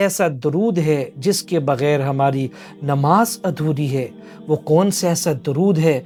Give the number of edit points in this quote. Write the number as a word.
zero